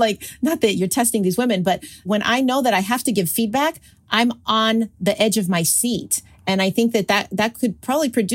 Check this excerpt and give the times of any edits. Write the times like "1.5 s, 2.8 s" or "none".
2.0 s, 5.0 s